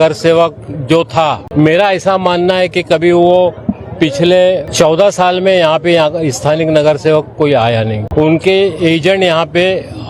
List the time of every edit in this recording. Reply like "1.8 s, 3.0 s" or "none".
1.4 s, 4.7 s, 8.0 s